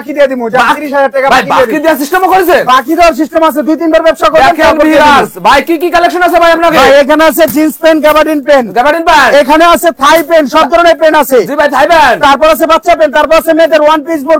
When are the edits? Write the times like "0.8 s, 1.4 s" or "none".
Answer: none